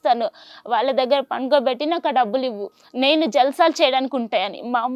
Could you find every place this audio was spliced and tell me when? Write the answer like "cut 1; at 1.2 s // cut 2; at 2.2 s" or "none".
cut 1; at 2.6 s